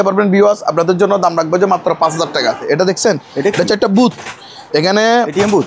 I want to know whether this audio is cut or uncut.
cut